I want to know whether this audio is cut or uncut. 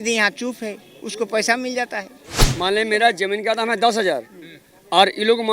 cut